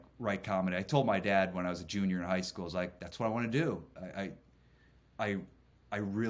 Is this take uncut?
yes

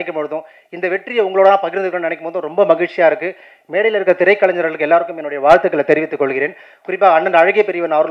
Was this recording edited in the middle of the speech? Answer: no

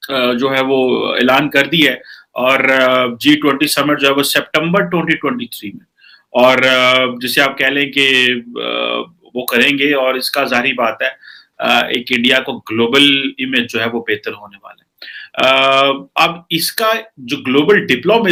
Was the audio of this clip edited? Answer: no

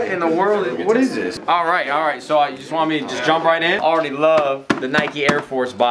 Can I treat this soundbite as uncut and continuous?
no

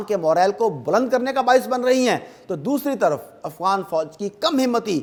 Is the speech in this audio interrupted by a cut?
no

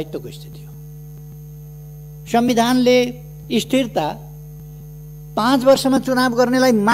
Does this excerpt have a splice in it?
yes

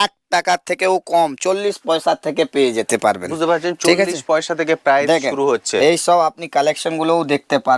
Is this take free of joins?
yes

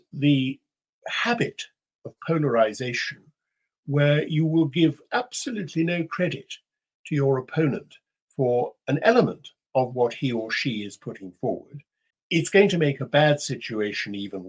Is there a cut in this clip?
yes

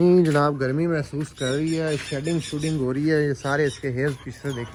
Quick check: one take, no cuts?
yes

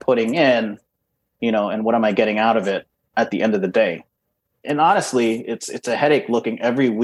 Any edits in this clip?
yes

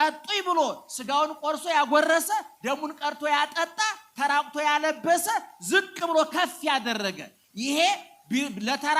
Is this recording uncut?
yes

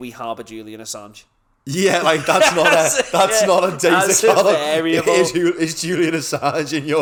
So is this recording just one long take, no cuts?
yes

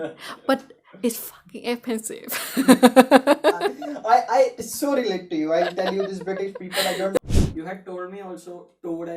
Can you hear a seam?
yes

